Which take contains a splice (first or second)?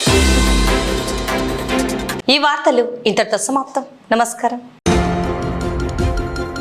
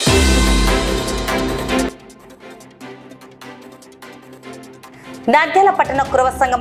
second